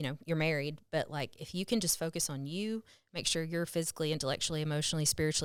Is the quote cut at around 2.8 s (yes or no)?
no